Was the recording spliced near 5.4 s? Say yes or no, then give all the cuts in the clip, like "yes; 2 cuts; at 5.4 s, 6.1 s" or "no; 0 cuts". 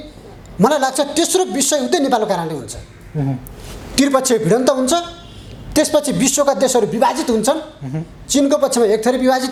no; 0 cuts